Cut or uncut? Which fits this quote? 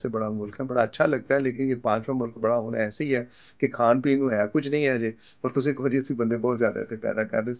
uncut